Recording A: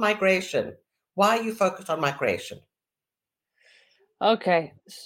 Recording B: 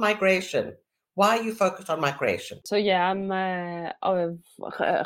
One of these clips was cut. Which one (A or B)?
B